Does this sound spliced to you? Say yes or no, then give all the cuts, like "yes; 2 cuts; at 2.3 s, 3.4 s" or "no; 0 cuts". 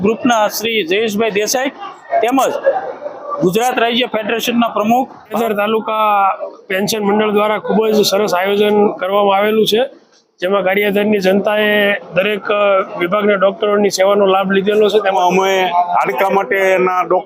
yes; 2 cuts; at 5.3 s, 15.1 s